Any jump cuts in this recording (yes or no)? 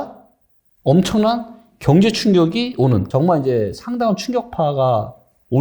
yes